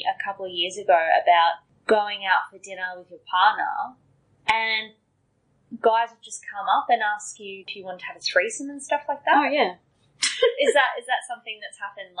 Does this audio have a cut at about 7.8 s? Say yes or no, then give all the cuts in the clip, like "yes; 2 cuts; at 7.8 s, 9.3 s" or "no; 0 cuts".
yes; 2 cuts; at 1.7 s, 7.8 s